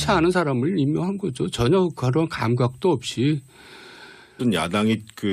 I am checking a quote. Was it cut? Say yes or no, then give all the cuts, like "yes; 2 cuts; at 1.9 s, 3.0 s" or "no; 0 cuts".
no; 0 cuts